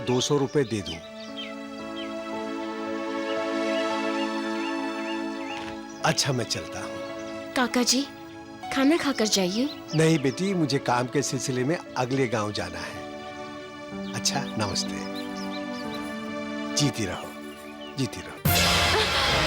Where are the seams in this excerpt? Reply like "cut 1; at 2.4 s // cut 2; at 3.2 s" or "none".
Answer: cut 1; at 18.3 s